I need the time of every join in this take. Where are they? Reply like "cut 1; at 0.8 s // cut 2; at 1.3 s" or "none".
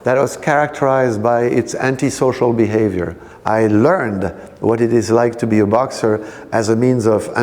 cut 1; at 3.2 s